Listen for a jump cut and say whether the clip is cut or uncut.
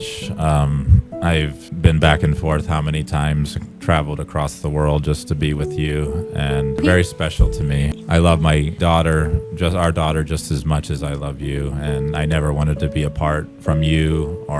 cut